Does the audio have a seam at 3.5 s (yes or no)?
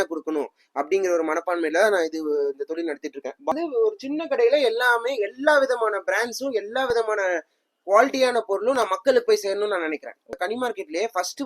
yes